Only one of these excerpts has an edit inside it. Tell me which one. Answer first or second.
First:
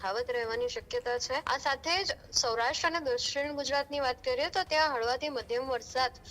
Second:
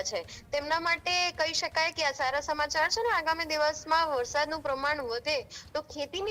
first